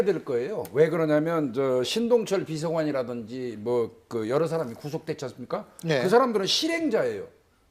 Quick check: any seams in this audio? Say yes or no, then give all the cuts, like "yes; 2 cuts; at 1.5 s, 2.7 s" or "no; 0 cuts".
yes; 1 cut; at 6.2 s